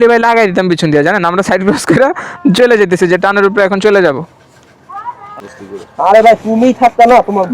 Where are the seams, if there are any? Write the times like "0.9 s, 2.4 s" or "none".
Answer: 5.4 s